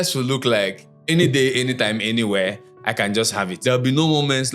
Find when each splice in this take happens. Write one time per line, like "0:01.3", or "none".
0:03.5